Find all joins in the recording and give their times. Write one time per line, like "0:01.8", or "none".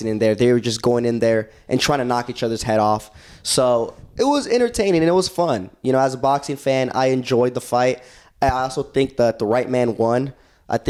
none